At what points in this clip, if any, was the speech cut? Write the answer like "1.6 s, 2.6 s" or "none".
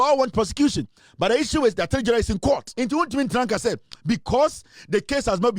2.7 s